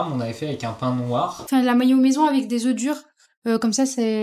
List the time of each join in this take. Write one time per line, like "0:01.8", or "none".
0:01.5